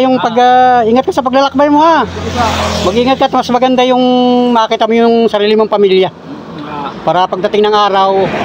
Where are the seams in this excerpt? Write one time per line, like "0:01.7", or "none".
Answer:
none